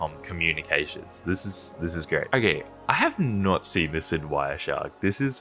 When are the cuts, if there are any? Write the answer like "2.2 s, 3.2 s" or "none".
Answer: 2.3 s